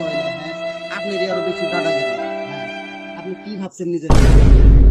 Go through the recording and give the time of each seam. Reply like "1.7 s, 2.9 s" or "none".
none